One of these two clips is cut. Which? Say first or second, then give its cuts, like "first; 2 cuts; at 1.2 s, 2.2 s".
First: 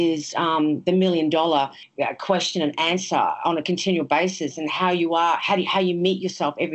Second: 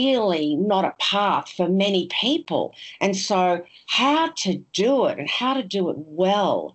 first; 1 cut; at 1.8 s